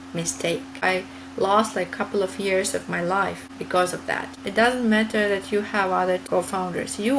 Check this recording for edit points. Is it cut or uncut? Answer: cut